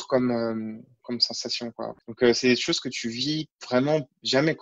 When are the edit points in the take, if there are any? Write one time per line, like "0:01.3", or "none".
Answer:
0:00.9
0:02.0
0:03.5